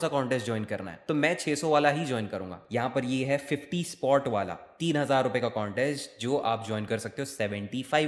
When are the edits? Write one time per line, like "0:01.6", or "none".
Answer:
0:02.6